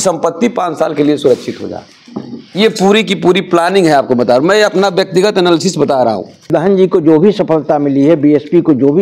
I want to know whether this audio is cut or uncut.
cut